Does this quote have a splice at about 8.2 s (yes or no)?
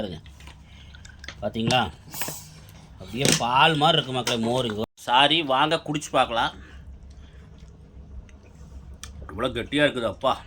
no